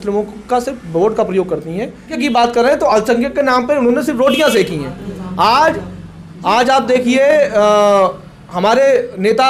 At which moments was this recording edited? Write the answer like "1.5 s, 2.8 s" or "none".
2.2 s